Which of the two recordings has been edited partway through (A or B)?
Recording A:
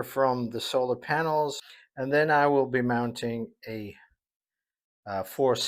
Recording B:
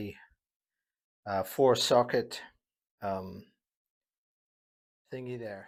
A